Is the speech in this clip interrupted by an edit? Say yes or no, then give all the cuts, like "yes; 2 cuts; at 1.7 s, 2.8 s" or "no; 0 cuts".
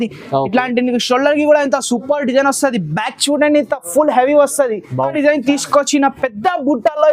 yes; 1 cut; at 5.1 s